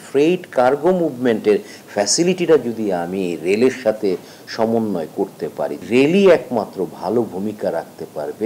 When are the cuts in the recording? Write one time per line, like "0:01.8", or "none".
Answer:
0:05.8